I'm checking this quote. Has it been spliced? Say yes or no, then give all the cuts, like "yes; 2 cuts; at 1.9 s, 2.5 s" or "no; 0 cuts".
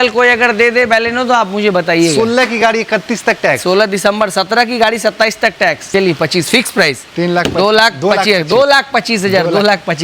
yes; 1 cut; at 5.9 s